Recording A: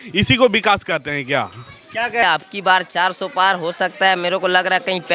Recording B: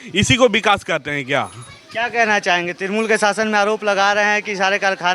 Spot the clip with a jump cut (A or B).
A